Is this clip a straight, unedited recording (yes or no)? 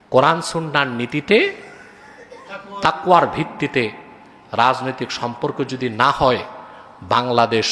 yes